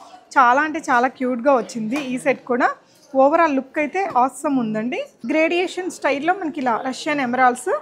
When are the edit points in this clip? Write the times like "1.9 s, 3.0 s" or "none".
5.1 s